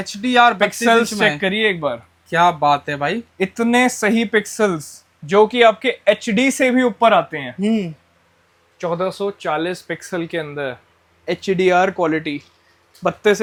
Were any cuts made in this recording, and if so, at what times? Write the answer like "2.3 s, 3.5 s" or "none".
none